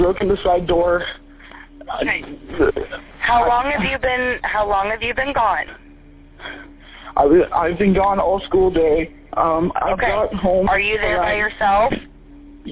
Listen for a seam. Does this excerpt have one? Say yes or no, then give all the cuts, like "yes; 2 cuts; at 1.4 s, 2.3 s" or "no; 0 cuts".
no; 0 cuts